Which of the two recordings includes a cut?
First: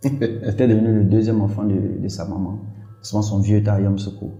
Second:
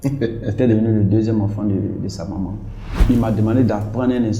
second; 1 cut; at 3.0 s

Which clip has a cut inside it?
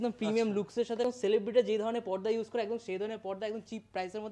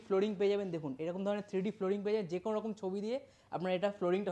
first; 1 cut; at 1.0 s

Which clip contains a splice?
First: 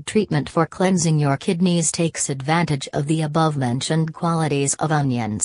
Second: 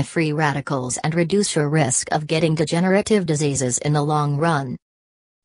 first; 1 cut; at 1.7 s

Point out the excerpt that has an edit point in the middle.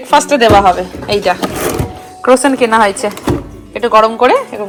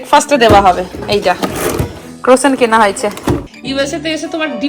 second; 1 cut; at 3.6 s

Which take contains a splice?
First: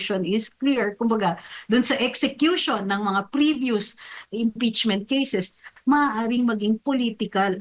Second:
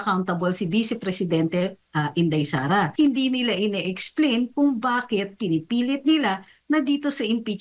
second; 1 cut; at 2.9 s

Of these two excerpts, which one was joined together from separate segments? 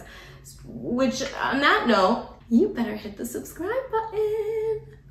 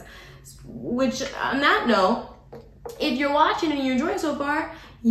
first; 1 cut; at 2.3 s

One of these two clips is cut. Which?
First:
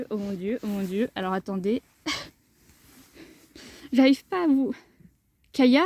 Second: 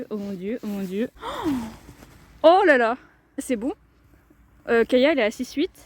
second; 2 cuts; at 1.1 s, 3.4 s

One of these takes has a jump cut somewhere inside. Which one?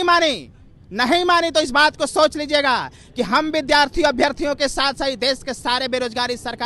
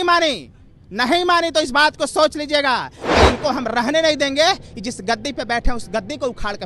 second; 1 cut; at 3.0 s

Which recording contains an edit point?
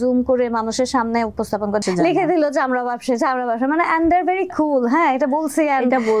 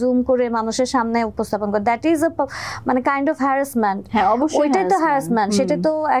first; 1 cut; at 1.8 s

